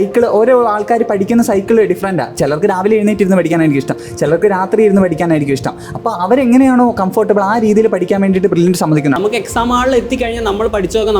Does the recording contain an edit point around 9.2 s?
yes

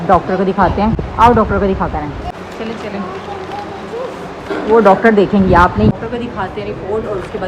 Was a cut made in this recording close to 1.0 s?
no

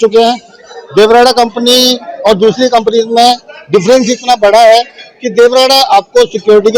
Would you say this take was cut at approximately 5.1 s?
no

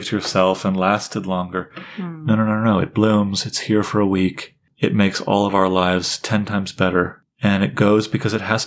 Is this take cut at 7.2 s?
yes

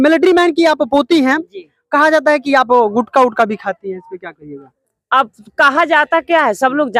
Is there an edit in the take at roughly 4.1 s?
no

